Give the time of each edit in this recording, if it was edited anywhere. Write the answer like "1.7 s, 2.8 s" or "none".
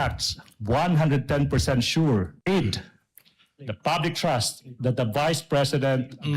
2.3 s